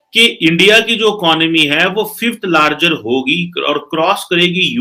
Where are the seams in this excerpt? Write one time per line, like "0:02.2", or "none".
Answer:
none

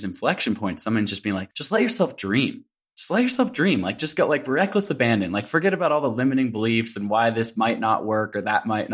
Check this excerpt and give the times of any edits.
0:01.5

